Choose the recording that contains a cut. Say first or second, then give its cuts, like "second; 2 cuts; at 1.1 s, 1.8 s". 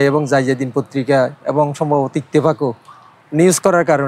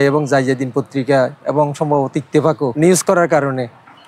second; 1 cut; at 2.7 s